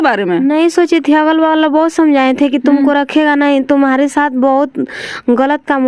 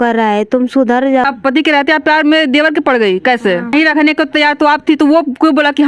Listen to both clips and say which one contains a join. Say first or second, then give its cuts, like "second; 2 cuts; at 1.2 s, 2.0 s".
second; 2 cuts; at 1.2 s, 3.7 s